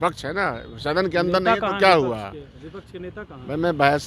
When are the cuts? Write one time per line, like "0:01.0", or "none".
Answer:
none